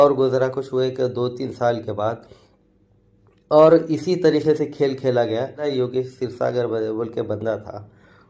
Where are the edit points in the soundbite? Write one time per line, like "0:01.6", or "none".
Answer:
0:05.6